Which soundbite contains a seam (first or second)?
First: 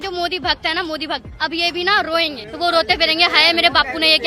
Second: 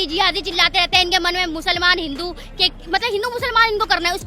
first